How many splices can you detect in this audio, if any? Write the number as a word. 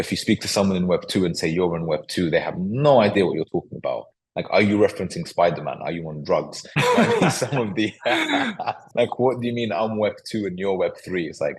one